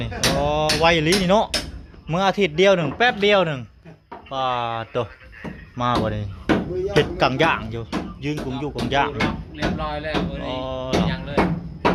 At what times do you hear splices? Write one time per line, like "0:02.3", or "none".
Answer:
none